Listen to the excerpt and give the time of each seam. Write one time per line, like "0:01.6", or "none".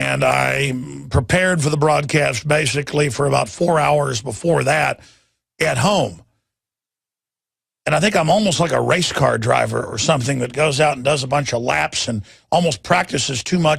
0:07.0